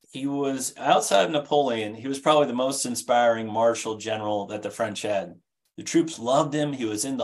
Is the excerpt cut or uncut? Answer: uncut